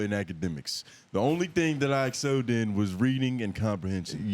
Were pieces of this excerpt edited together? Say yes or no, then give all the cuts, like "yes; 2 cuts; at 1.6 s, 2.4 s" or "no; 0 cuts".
no; 0 cuts